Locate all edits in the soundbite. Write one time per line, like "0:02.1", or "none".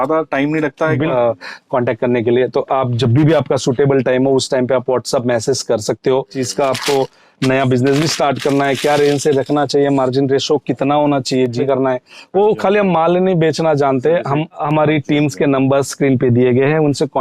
0:01.1
0:06.4
0:11.6
0:14.6